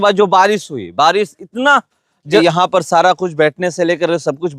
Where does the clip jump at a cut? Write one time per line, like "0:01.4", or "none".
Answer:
0:02.4